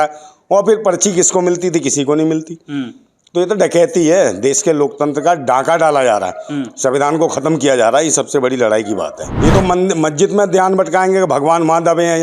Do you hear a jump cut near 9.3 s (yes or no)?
yes